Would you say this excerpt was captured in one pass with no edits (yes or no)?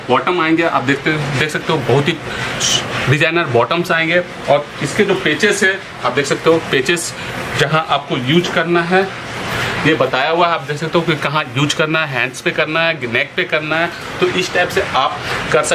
yes